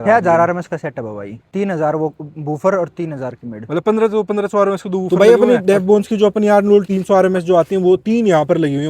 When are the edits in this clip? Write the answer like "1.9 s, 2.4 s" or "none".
1.4 s, 5.1 s, 6.9 s